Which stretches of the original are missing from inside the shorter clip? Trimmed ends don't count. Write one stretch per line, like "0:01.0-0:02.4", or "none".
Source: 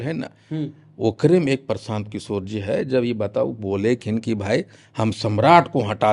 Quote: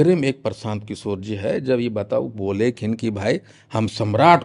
none